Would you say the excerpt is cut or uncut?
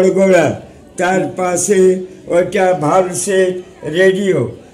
uncut